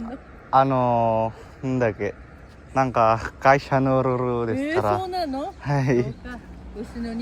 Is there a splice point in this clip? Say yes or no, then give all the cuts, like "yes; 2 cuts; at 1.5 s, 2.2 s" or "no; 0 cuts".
no; 0 cuts